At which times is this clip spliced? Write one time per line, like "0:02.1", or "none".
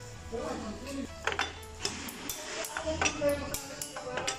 0:01.1